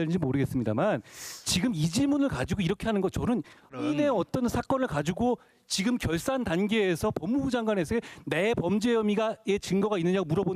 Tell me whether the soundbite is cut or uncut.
cut